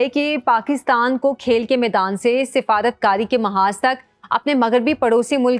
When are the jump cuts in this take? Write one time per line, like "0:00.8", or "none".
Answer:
none